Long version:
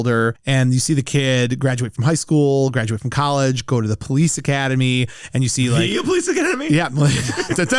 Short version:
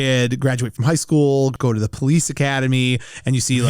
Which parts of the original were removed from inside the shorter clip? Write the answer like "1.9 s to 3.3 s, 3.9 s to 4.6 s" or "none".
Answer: 2.7 s to 3.6 s